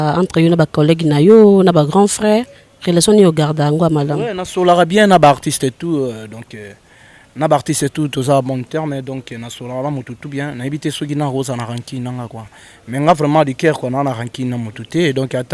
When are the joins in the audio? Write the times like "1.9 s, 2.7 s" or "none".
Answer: none

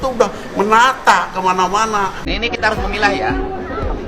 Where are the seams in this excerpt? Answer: 2.2 s

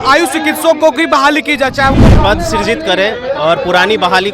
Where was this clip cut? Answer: 1.9 s

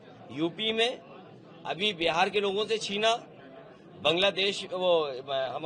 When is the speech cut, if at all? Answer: none

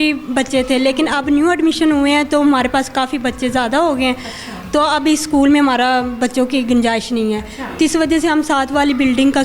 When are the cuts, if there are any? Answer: none

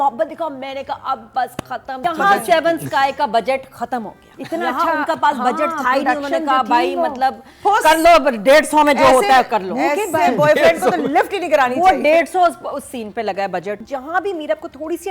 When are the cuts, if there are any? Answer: 2.0 s, 13.8 s

